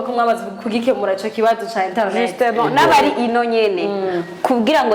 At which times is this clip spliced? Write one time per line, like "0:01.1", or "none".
none